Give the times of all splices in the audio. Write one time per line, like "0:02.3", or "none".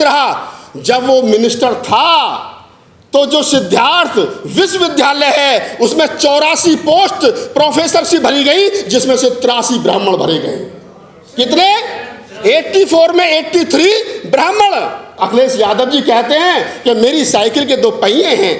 0:15.1